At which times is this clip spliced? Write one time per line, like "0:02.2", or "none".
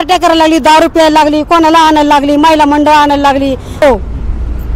0:03.8